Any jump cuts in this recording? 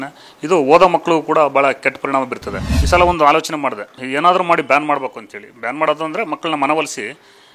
yes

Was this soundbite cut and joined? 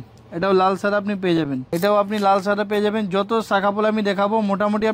yes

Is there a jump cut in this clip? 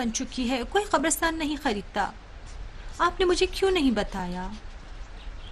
no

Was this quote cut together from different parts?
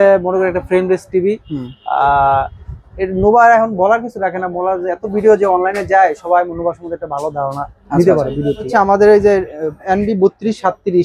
yes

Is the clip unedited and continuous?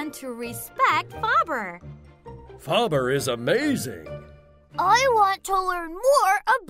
yes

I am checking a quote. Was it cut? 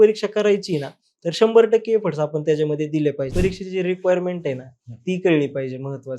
yes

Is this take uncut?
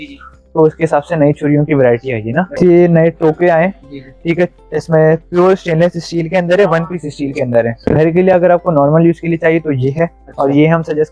no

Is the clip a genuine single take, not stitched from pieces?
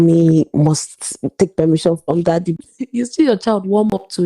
no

